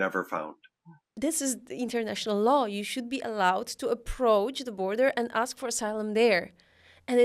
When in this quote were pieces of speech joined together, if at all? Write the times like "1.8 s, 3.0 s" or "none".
1.1 s